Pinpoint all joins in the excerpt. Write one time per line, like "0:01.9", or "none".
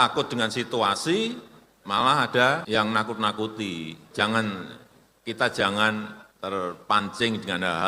0:02.6
0:04.0
0:06.2